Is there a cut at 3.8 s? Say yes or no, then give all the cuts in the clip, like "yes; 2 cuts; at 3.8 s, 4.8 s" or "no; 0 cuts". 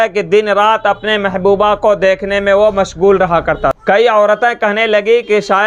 yes; 1 cut; at 3.8 s